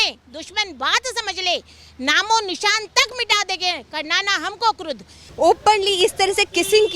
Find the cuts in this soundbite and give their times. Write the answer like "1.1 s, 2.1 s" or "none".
5.2 s